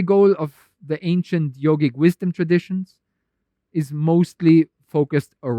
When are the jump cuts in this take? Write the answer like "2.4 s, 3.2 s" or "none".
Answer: none